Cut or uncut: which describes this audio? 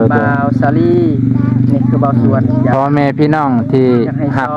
uncut